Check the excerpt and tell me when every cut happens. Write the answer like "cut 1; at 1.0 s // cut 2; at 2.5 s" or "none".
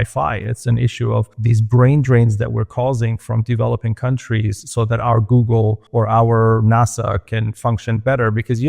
cut 1; at 1.4 s // cut 2; at 5.8 s // cut 3; at 7.3 s